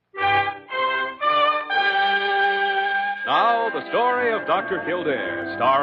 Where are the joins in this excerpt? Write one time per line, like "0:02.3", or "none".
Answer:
0:02.7